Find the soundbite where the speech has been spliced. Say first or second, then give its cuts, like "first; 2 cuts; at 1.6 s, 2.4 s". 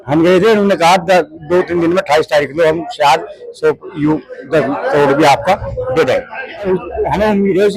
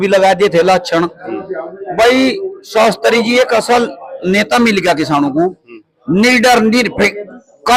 first; 1 cut; at 6.7 s